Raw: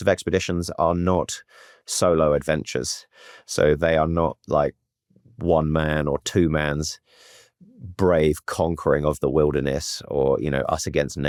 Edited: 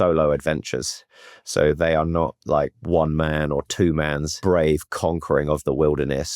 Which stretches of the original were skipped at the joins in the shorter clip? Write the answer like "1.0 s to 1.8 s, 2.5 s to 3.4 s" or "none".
4.8 s to 5.3 s, 6.9 s to 7.9 s

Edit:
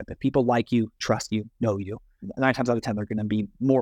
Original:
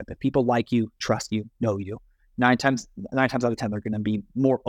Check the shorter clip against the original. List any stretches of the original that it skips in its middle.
2.2 s to 2.9 s

